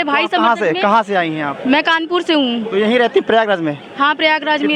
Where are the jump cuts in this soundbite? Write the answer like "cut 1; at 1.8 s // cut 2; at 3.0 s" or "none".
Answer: none